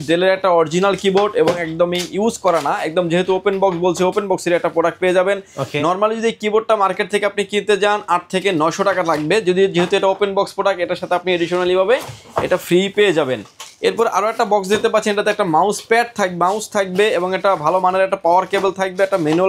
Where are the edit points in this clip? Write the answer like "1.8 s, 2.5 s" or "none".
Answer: none